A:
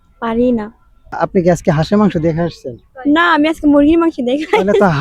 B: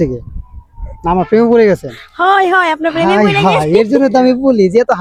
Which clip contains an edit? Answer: A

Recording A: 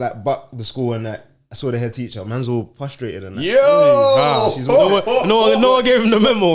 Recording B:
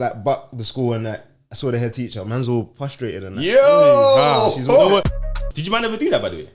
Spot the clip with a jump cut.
B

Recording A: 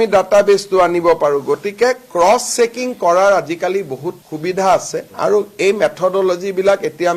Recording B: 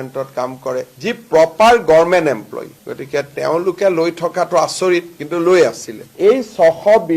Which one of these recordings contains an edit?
B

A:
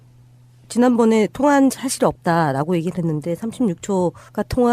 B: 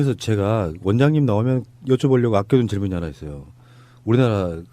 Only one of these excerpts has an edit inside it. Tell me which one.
B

